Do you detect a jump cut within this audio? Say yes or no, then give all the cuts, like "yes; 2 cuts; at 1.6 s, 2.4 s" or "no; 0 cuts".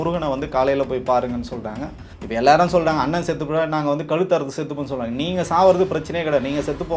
yes; 1 cut; at 2.0 s